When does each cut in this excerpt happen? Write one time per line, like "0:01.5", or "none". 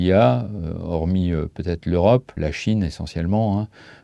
0:02.4